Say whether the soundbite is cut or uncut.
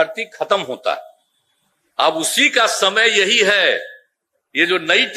uncut